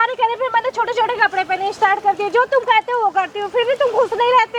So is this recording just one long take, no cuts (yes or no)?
yes